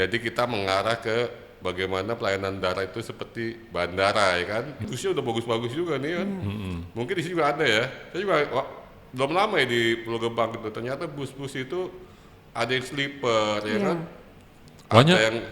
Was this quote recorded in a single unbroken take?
no; 1 cut; at 4.9 s

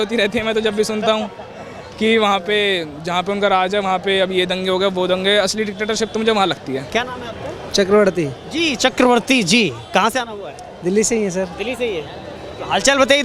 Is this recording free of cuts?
yes; 0 cuts

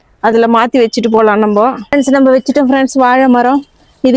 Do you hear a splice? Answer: yes; 1 cut; at 1.8 s

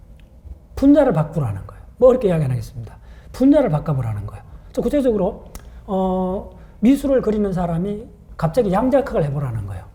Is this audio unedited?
yes; 0 cuts

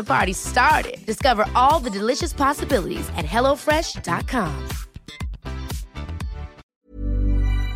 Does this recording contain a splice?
yes; 1 cut; at 6.6 s

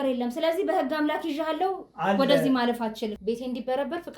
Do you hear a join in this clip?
yes; 1 cut; at 3.1 s

